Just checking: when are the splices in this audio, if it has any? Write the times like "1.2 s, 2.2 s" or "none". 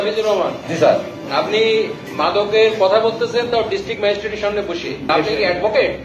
5.1 s